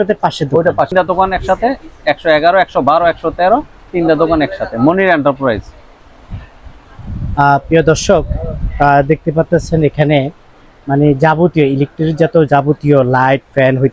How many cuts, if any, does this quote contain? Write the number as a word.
one